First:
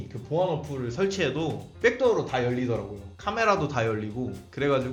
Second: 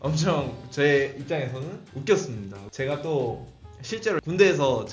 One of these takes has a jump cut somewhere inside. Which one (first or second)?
second